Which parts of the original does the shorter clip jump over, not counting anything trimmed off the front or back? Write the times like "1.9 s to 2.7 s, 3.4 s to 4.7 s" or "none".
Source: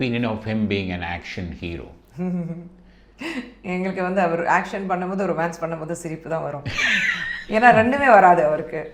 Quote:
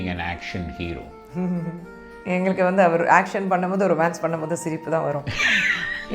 3.0 s to 3.5 s